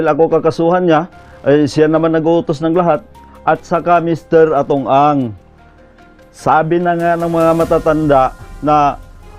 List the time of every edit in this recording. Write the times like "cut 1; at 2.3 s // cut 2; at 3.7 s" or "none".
cut 1; at 3.1 s